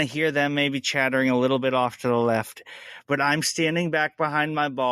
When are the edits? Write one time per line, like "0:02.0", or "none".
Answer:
none